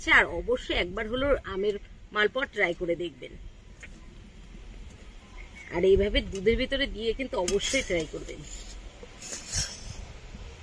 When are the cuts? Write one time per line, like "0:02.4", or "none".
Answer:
0:09.5